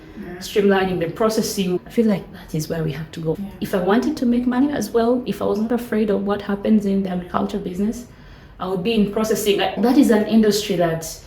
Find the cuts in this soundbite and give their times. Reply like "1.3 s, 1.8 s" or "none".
9.8 s